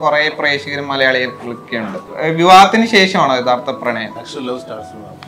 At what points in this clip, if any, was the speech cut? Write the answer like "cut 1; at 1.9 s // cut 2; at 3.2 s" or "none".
cut 1; at 2.1 s // cut 2; at 4.3 s